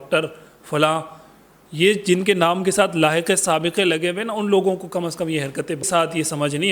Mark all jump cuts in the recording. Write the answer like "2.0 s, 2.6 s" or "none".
5.8 s